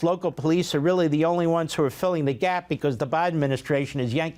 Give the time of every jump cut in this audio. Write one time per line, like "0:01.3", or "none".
none